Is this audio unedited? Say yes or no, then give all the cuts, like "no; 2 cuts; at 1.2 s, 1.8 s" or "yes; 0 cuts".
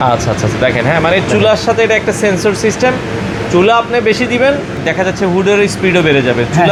yes; 0 cuts